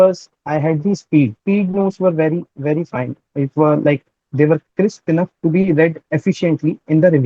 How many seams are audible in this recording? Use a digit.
2